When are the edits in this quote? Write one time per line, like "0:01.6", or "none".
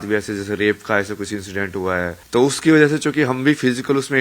0:02.2